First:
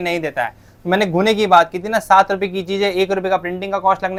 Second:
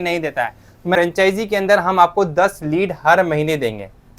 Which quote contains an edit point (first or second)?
second